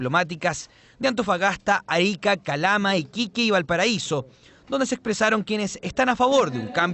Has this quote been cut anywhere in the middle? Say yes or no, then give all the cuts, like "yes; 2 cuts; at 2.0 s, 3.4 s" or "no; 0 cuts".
yes; 1 cut; at 1.1 s